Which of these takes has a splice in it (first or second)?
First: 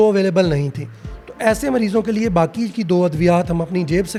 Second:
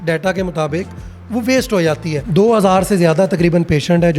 second